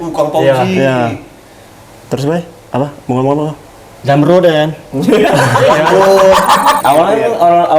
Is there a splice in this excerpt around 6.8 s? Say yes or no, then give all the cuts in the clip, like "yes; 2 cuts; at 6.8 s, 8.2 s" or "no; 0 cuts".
yes; 1 cut; at 6.8 s